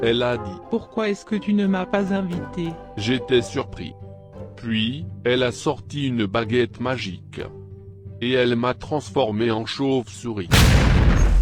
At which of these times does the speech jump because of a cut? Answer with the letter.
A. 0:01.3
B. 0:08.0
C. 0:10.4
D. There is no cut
C